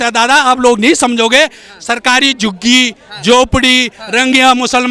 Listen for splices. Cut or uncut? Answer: uncut